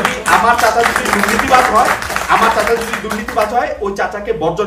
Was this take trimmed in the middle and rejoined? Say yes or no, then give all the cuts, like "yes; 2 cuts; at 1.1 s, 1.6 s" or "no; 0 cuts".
no; 0 cuts